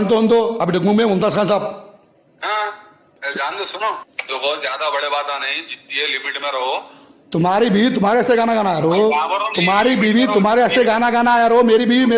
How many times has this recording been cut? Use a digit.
1